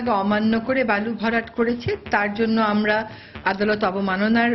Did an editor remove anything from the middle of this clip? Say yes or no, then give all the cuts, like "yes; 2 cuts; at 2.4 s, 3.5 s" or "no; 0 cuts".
no; 0 cuts